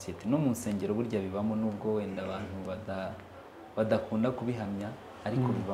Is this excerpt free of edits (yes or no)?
yes